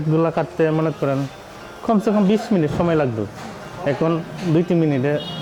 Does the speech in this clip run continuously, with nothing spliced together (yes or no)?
yes